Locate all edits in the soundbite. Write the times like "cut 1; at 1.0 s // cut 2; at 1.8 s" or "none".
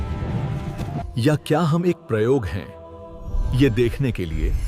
cut 1; at 1.0 s